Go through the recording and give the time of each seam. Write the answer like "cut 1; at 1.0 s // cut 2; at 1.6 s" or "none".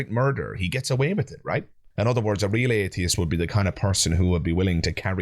cut 1; at 1.8 s